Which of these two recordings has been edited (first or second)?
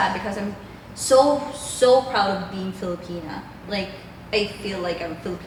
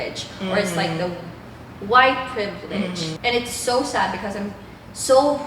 second